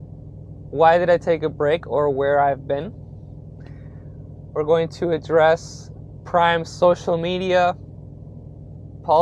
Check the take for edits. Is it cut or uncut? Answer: uncut